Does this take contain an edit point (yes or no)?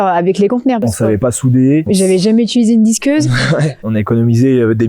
yes